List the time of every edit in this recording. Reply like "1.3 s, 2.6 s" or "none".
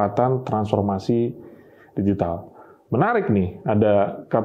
none